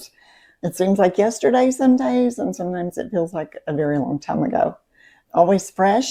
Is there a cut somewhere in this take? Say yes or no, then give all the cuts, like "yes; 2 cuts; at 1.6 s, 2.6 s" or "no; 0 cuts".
no; 0 cuts